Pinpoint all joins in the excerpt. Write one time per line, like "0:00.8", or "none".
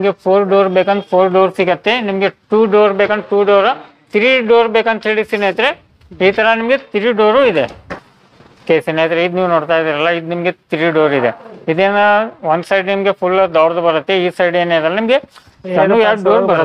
none